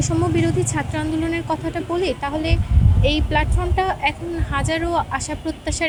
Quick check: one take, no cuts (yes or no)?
yes